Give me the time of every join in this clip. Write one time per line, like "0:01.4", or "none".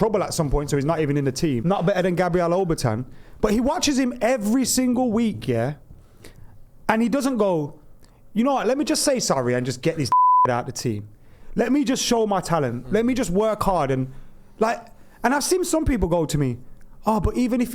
0:01.6